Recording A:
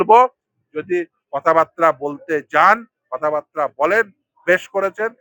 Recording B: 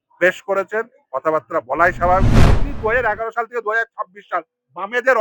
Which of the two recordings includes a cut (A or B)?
B